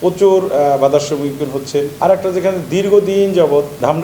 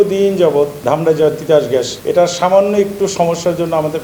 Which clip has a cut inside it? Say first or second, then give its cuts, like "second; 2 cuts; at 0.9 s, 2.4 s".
first; 1 cut; at 1.9 s